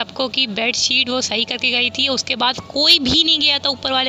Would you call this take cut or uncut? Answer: uncut